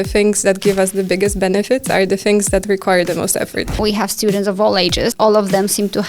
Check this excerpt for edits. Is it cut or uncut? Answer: cut